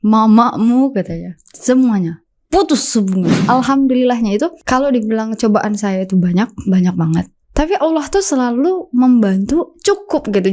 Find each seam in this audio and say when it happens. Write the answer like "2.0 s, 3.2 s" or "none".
3.4 s, 4.6 s